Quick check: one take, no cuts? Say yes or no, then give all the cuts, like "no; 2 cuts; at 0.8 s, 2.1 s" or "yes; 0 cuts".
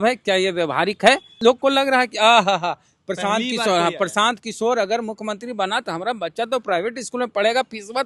no; 1 cut; at 1.4 s